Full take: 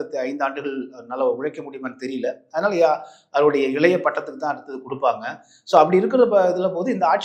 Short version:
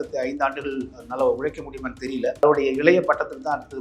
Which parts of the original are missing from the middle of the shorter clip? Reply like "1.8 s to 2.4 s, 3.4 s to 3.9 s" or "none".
2.4 s to 3.4 s